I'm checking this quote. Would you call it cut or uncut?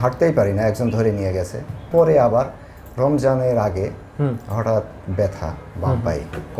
cut